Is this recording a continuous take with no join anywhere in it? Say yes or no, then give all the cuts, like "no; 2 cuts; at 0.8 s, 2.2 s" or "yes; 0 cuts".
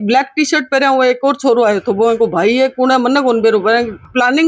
yes; 0 cuts